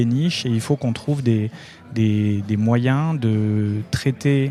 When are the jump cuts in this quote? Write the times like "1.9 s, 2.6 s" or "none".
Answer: none